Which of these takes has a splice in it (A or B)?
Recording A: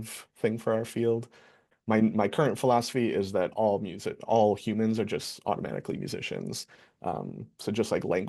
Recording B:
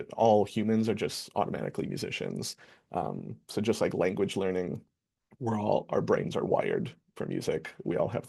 A